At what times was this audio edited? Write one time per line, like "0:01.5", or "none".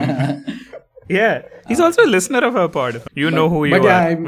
0:03.0